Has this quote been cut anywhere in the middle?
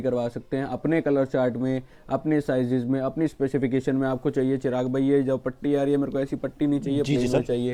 no; 0 cuts

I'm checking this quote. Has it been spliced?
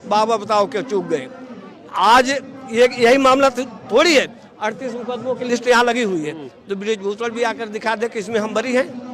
no; 0 cuts

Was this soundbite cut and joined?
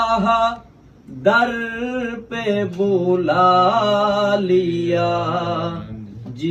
no; 0 cuts

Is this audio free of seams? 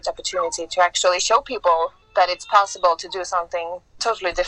yes; 0 cuts

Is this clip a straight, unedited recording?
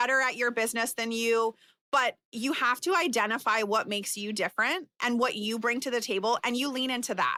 yes; 0 cuts

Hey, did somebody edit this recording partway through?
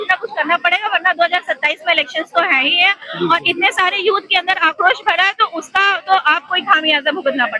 no; 0 cuts

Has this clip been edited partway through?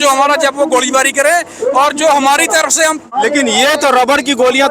yes; 1 cut; at 3.0 s

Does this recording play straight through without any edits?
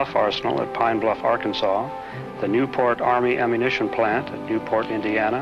no; 1 cut; at 4.5 s

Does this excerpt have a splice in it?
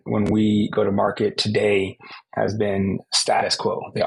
no; 0 cuts

